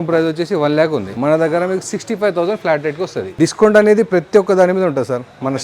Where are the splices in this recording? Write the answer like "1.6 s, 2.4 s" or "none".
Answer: 1.1 s, 3.3 s